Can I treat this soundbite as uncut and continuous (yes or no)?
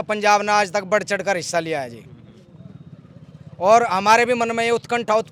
yes